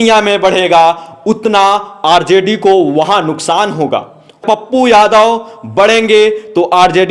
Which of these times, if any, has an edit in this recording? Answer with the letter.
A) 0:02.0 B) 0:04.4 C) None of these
B